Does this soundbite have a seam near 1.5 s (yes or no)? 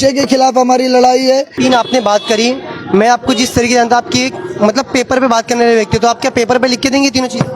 yes